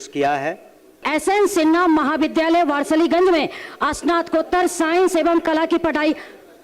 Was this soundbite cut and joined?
yes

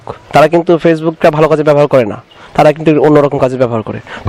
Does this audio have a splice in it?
no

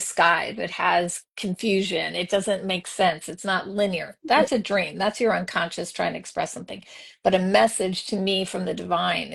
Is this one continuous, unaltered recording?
yes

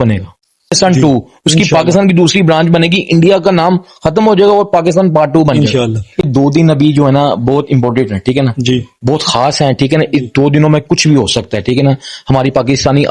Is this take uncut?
no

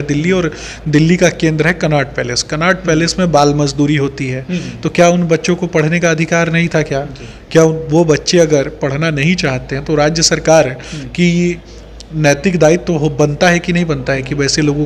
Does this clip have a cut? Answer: no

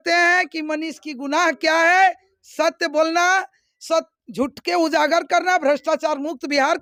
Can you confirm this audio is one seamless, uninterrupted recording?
yes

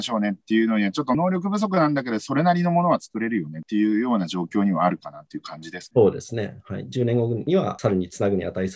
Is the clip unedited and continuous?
yes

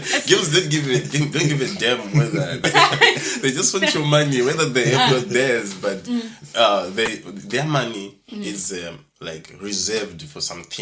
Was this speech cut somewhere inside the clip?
yes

